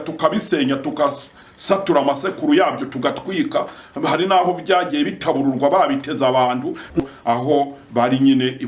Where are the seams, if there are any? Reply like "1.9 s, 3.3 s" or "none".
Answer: 7.0 s